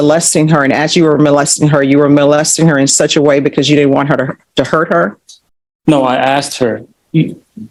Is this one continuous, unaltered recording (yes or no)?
yes